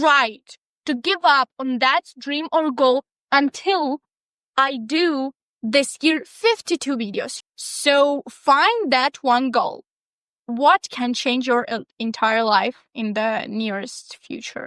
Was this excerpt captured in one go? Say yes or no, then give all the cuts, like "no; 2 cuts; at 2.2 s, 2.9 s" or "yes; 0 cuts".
no; 1 cut; at 7.3 s